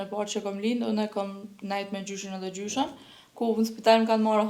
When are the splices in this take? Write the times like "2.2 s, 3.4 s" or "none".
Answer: none